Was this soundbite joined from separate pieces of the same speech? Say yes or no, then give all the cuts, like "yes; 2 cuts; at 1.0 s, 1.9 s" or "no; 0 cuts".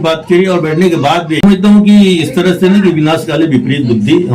yes; 1 cut; at 1.4 s